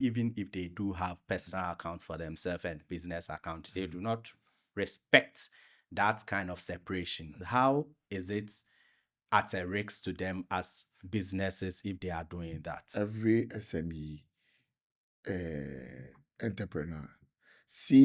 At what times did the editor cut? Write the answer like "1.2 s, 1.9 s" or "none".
7.4 s, 12.8 s